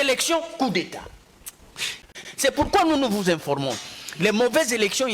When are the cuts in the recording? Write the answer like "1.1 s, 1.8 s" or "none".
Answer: 2.1 s